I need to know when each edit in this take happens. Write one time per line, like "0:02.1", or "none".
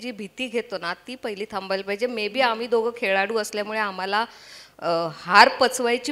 none